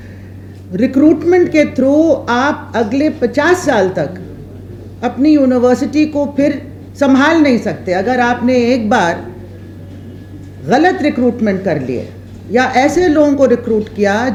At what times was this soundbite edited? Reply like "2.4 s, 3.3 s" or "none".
none

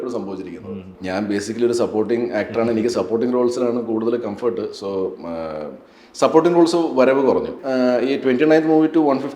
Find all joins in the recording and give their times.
1.0 s, 7.6 s

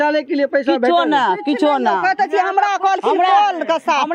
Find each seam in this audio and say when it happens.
none

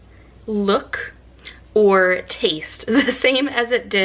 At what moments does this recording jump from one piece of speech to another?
none

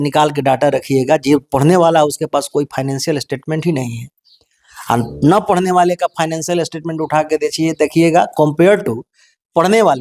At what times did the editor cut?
none

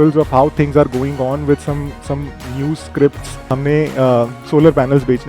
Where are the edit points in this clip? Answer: 3.4 s

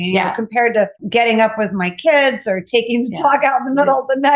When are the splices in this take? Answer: 1.0 s

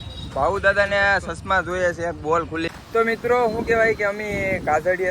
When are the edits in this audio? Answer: 2.7 s

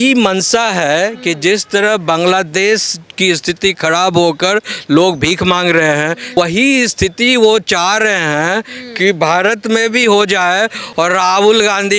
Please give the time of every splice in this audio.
6.3 s, 10.8 s

